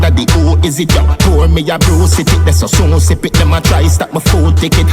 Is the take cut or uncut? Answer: cut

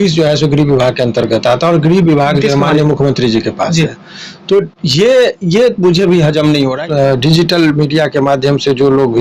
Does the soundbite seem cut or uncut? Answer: cut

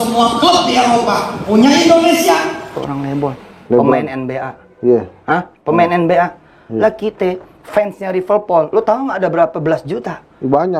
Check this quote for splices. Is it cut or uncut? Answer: cut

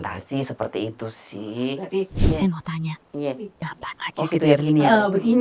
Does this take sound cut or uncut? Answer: cut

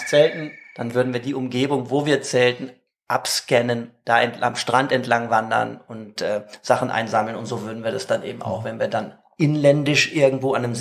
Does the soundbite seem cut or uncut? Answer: uncut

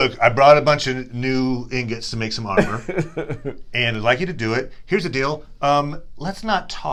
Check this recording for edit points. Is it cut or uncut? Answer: uncut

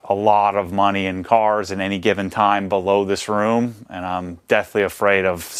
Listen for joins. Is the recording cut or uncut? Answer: uncut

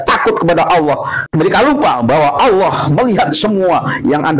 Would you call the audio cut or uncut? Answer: cut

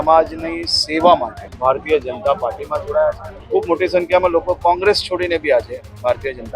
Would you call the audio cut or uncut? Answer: cut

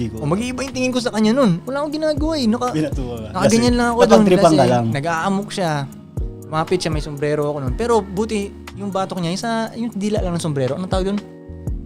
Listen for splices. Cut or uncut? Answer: uncut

